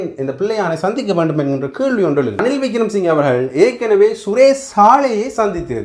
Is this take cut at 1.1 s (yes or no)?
no